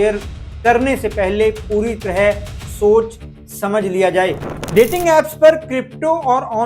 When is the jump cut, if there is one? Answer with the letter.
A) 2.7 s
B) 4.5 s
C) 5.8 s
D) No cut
B